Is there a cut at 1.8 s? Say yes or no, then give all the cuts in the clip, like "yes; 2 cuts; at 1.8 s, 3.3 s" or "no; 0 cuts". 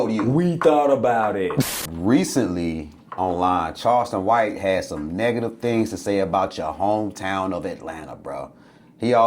yes; 1 cut; at 1.8 s